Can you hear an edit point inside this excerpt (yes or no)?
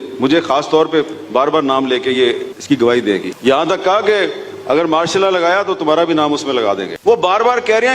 no